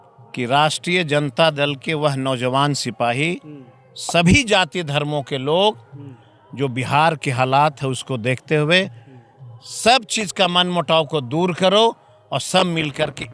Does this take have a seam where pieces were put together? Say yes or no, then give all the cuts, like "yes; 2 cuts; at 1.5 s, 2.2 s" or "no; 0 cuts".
no; 0 cuts